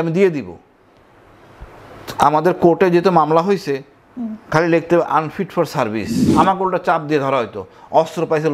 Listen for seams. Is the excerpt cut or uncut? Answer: cut